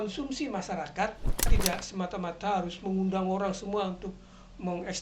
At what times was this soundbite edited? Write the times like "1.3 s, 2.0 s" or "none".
1.5 s

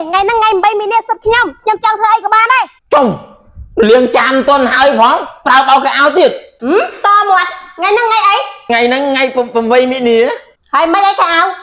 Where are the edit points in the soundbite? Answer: 2.8 s, 6.5 s, 8.7 s, 10.5 s

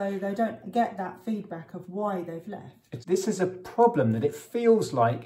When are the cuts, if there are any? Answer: 2.9 s

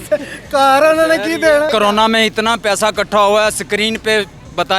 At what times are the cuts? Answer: 1.7 s

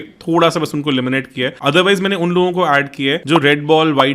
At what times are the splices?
1.5 s, 3.2 s

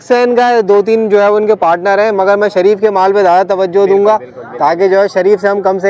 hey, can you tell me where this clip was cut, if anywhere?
none

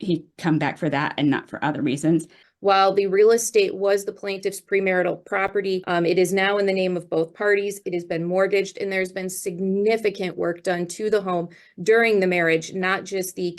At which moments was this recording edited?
2.4 s, 5.8 s

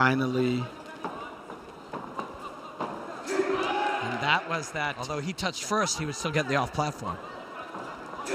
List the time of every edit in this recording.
5.0 s

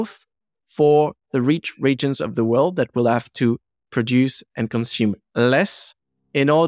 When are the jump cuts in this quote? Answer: none

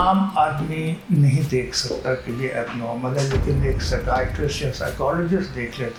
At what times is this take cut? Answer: none

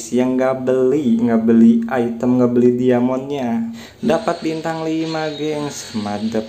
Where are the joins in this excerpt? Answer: 3.8 s

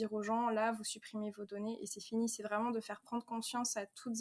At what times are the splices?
none

